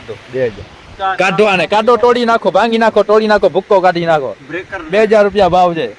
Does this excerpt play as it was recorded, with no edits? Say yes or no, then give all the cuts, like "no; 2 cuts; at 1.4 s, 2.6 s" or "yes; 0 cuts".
yes; 0 cuts